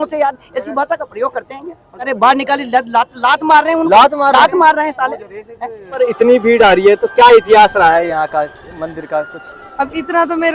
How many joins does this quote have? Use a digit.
2